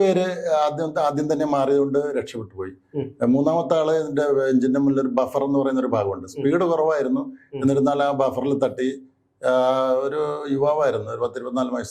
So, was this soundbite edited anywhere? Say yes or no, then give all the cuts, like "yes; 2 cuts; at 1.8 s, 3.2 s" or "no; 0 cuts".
no; 0 cuts